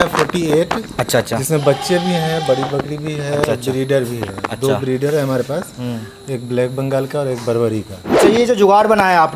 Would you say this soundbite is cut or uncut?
cut